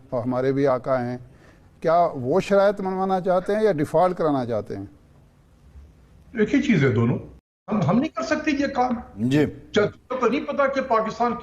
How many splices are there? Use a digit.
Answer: 1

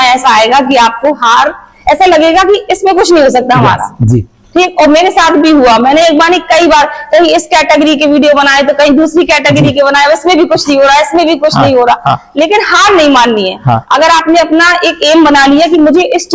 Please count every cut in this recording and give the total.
0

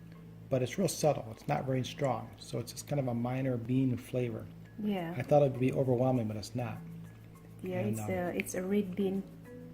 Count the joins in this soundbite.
1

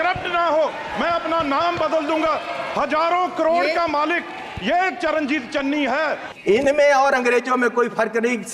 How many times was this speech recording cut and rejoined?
1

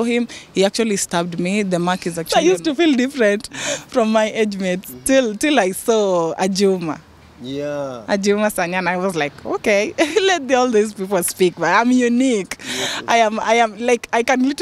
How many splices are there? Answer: 1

